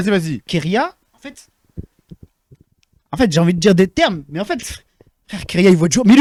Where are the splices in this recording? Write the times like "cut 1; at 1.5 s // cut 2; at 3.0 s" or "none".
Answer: none